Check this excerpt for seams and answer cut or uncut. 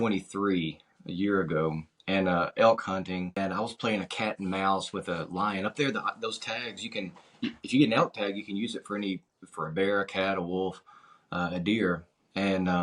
cut